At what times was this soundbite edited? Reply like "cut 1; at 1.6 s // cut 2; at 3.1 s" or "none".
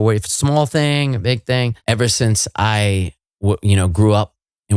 cut 1; at 1.8 s

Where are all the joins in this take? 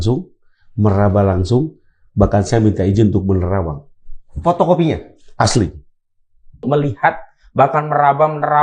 cut 1; at 6.6 s

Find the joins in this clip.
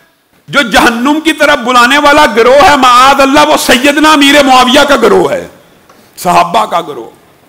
none

